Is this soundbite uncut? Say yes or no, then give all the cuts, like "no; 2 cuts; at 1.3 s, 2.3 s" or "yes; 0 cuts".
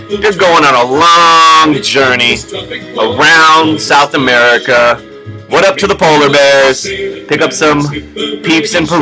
no; 1 cut; at 1.2 s